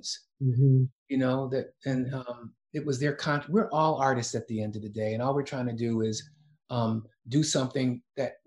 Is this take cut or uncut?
uncut